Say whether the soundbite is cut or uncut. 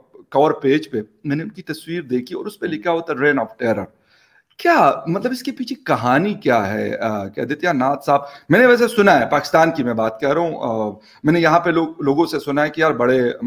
uncut